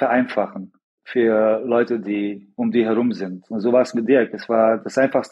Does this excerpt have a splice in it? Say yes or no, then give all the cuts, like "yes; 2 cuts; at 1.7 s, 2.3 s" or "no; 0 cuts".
yes; 1 cut; at 2.4 s